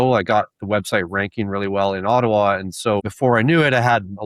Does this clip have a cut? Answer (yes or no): yes